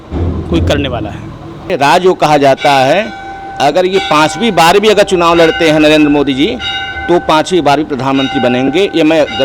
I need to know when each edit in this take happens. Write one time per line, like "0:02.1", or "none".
0:01.6